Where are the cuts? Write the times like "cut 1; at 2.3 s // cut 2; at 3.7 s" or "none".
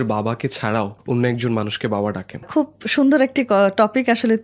cut 1; at 1.0 s // cut 2; at 2.5 s